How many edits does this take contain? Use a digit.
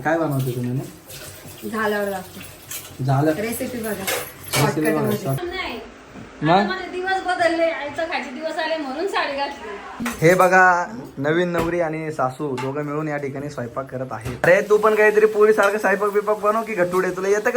3